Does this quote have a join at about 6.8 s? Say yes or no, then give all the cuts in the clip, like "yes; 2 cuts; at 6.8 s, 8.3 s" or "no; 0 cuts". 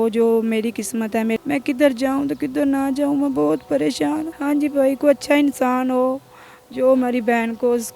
no; 2 cuts; at 1.4 s, 4.3 s